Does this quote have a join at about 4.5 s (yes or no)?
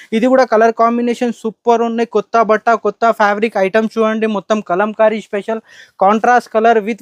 no